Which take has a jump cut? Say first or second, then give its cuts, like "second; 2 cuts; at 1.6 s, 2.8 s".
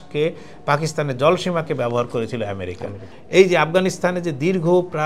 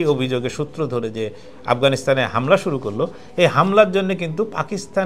first; 1 cut; at 3.2 s